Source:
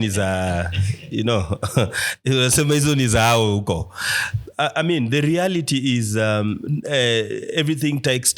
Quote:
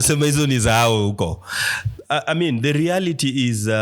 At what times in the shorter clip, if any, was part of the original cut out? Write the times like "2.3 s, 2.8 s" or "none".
none